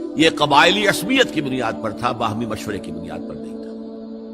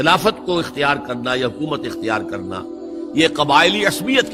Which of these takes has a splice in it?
first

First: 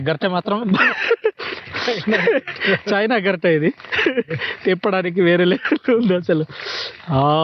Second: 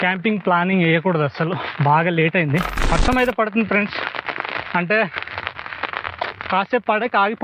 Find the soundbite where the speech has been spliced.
second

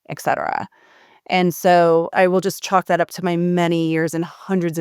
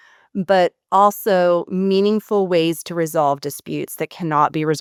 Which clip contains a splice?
first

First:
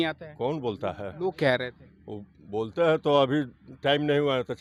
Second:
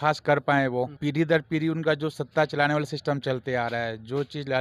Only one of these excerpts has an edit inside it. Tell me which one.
second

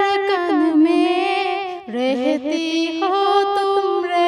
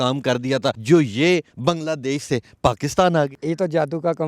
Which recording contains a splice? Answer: second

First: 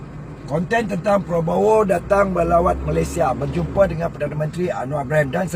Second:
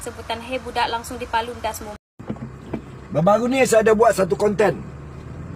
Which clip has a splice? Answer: second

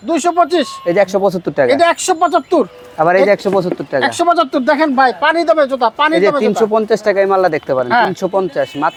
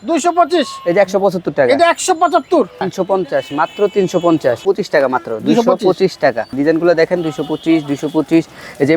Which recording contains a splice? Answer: second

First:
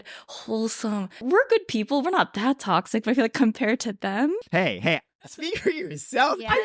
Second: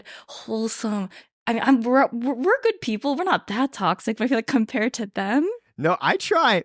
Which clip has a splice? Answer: first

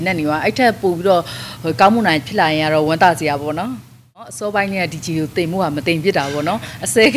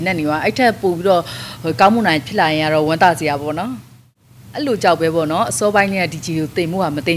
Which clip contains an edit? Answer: first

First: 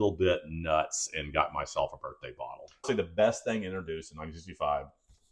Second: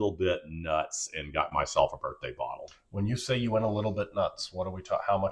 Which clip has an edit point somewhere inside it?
first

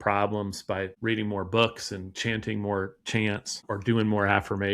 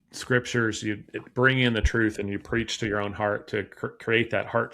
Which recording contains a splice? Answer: first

